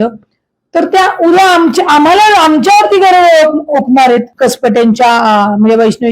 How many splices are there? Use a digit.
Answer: 1